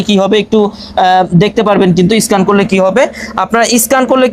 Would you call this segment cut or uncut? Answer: uncut